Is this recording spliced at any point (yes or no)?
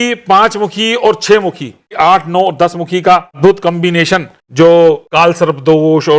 yes